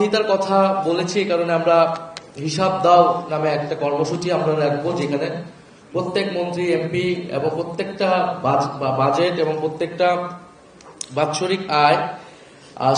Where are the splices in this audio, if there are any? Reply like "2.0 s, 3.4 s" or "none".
none